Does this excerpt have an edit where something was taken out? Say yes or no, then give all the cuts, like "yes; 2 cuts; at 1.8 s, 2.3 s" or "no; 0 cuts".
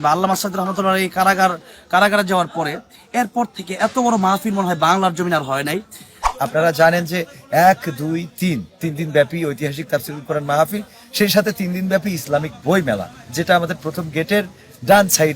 yes; 1 cut; at 6.2 s